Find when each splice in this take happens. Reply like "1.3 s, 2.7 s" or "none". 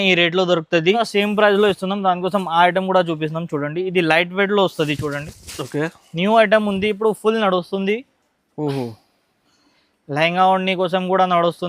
1.1 s